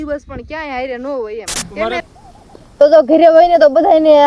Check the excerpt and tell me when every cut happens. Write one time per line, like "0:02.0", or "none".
0:02.0

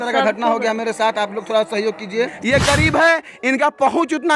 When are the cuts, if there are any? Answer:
0:02.4

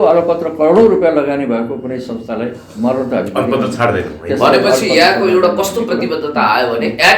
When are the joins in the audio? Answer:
none

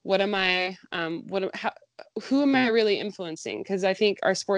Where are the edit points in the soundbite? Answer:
none

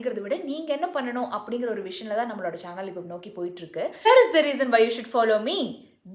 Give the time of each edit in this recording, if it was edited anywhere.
0:04.1

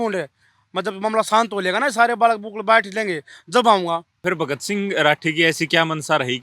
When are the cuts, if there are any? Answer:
0:04.1

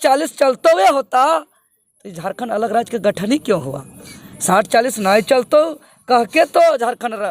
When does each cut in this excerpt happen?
none

